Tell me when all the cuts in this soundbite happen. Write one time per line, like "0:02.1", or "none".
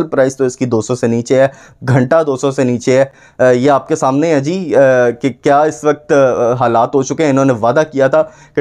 none